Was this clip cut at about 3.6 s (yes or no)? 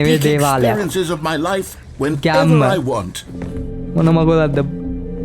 yes